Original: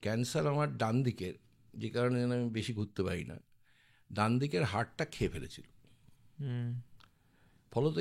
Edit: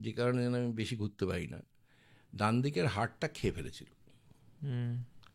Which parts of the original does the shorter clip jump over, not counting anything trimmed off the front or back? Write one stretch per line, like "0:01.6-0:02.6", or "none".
none